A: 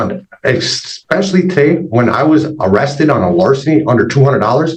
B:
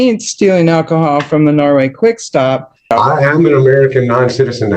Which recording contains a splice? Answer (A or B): B